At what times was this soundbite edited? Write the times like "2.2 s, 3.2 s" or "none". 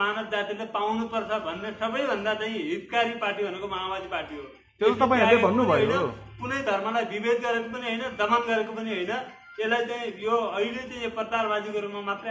none